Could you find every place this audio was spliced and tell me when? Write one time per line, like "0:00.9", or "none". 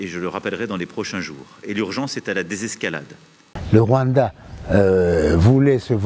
0:03.5